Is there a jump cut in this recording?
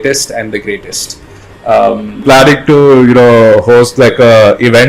yes; 1 cut; at 2.2 s

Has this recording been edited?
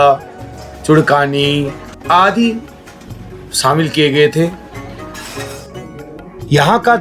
no; 0 cuts

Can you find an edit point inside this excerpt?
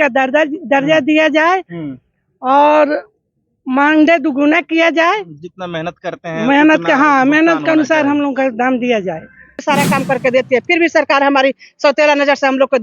yes; 1 cut; at 9.6 s

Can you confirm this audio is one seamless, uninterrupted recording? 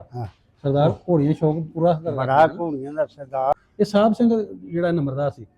no; 1 cut; at 3.5 s

